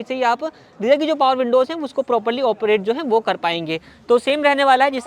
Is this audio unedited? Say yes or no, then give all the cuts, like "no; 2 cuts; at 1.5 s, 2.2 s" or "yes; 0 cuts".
yes; 0 cuts